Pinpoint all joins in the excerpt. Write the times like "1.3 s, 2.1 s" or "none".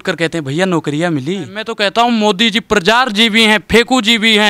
1.7 s